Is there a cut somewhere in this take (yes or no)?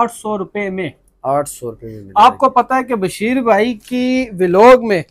no